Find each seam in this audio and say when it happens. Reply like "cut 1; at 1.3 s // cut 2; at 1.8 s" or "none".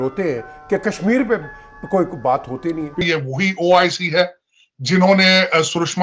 cut 1; at 3.0 s